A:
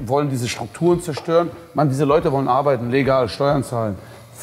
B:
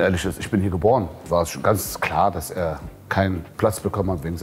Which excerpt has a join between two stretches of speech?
B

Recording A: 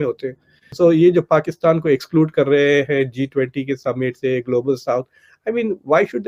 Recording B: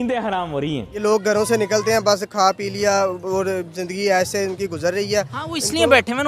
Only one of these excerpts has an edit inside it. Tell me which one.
B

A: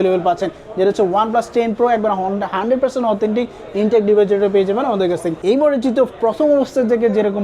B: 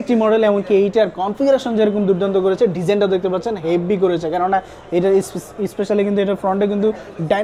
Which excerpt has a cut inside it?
A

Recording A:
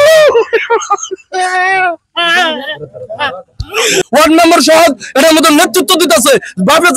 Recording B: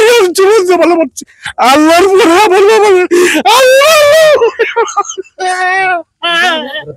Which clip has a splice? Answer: A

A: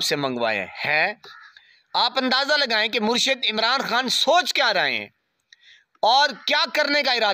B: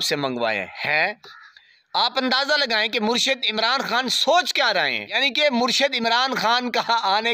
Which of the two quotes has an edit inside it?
B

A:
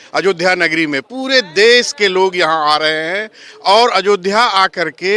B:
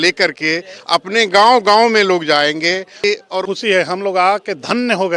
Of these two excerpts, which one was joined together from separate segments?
B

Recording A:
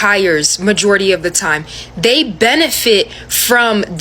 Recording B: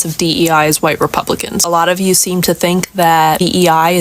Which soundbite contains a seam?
B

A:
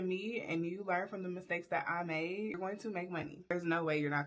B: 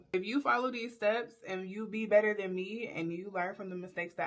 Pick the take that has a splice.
A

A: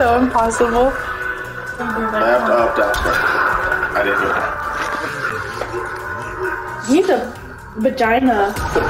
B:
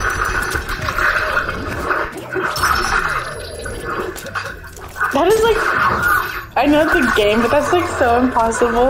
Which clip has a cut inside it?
A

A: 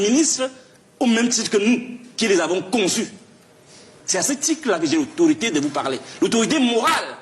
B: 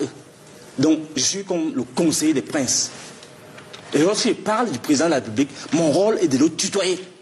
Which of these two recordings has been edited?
A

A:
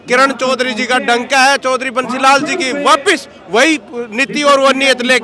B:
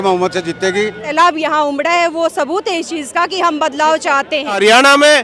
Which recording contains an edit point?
B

